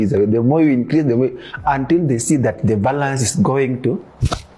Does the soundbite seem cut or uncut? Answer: uncut